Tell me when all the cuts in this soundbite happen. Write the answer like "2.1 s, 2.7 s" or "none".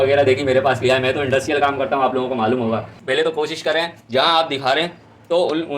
2.9 s